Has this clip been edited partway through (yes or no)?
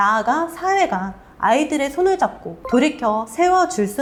no